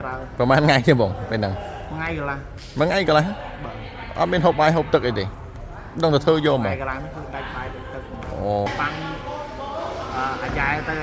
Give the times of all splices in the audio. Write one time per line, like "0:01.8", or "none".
0:08.7